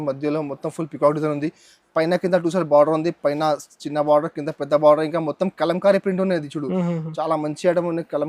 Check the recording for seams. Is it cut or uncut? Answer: uncut